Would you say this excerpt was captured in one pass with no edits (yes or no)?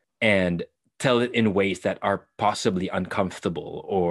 yes